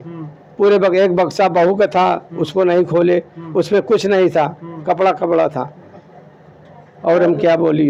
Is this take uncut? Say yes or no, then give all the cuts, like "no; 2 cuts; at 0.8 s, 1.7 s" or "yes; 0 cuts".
yes; 0 cuts